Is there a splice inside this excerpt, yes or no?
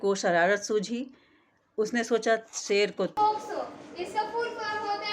yes